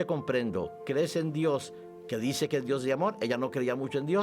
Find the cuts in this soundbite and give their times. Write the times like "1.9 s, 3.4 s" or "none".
none